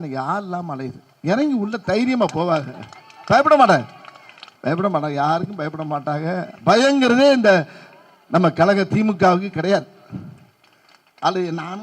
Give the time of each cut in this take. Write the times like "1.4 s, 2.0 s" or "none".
none